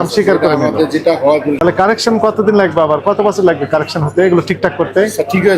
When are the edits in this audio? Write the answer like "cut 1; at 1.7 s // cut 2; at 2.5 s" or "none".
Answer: cut 1; at 1.6 s